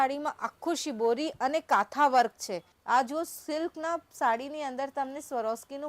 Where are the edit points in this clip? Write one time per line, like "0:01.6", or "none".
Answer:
0:02.7